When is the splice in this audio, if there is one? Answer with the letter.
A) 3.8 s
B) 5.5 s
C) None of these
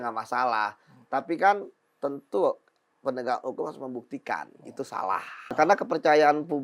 B